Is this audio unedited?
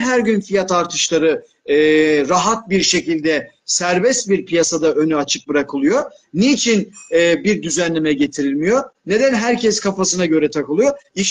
yes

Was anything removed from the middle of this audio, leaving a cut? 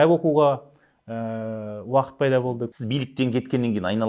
yes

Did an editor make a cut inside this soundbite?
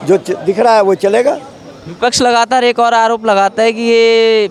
no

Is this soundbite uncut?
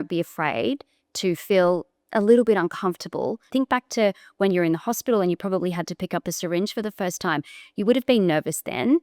no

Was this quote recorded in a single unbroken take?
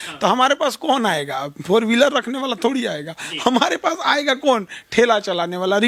yes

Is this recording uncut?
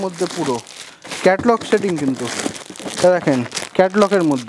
yes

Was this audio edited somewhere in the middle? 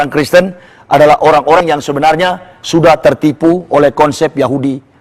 yes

